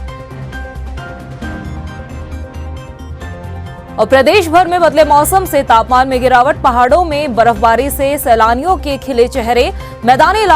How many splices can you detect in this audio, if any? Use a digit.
1